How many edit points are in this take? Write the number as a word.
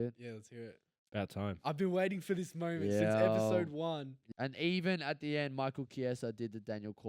one